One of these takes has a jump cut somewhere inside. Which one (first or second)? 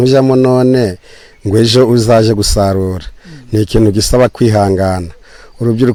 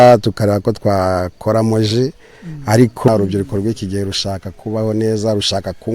second